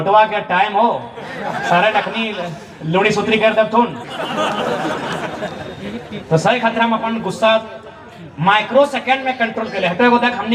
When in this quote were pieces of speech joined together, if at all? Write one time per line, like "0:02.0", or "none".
none